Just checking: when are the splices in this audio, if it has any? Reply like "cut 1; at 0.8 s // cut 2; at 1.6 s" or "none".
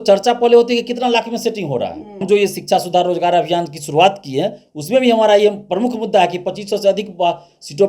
cut 1; at 2.2 s